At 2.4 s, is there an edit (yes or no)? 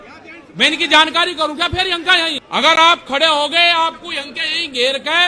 yes